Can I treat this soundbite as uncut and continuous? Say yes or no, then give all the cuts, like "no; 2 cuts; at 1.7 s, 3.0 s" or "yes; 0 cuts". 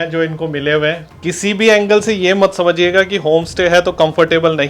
no; 1 cut; at 1.1 s